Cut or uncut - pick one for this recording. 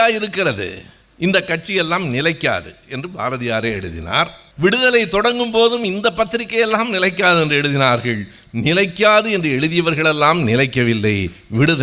cut